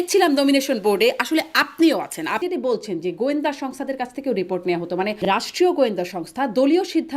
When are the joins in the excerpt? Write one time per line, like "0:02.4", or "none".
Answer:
0:02.4
0:05.2